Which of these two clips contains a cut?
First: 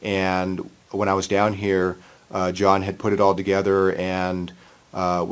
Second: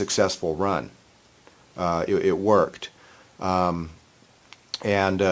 first; 1 cut; at 2.5 s

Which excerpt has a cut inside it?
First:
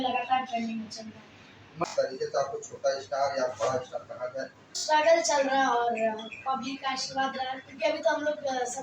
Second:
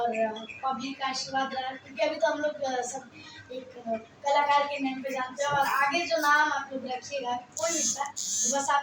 first; 2 cuts; at 1.8 s, 4.8 s

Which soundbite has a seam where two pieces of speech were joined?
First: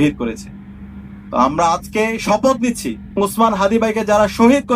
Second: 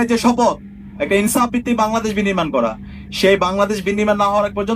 first; 1 cut; at 3.2 s

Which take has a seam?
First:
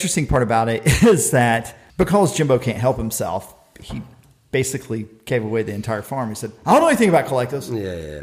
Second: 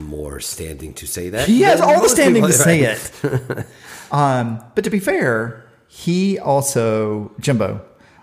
first; 1 cut; at 1.8 s

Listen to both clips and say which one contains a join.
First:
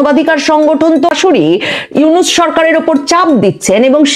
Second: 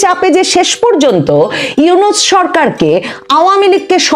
first; 1 cut; at 1.1 s

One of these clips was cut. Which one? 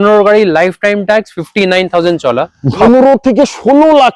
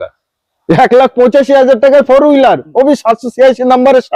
first; 1 cut; at 2.8 s

